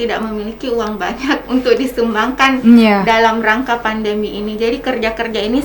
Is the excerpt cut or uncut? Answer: uncut